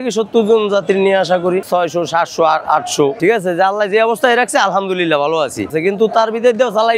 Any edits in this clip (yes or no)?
yes